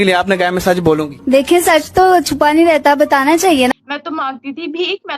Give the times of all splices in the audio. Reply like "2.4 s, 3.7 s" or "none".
3.7 s